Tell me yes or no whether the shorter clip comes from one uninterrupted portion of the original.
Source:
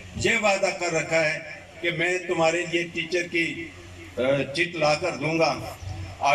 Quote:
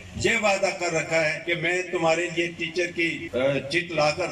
no